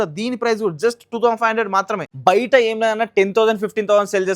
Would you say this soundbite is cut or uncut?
cut